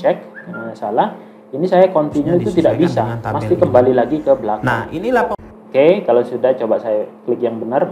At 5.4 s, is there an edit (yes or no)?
yes